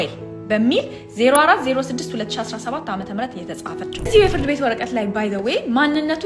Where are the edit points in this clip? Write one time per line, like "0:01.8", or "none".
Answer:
0:03.7